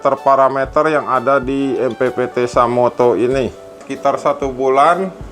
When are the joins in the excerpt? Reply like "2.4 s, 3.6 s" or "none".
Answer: 3.9 s